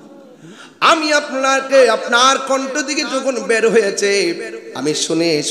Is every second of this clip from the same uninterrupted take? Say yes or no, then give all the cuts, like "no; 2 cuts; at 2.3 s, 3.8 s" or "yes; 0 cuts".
yes; 0 cuts